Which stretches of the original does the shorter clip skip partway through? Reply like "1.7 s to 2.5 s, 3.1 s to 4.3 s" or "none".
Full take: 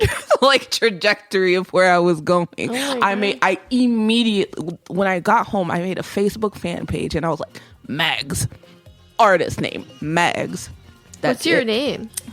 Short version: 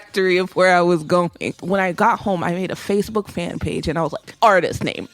2.7 s to 4.8 s, 7.5 s to 9.0 s